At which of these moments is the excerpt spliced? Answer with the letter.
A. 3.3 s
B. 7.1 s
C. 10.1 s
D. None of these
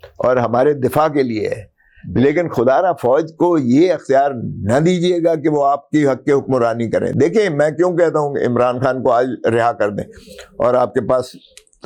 D